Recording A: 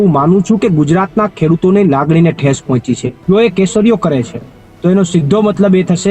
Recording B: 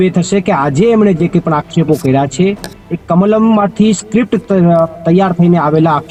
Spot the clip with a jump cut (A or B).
A